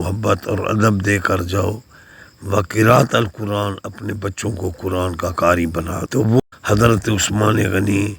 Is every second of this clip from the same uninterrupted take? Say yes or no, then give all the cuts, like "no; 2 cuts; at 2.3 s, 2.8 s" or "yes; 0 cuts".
no; 1 cut; at 6.5 s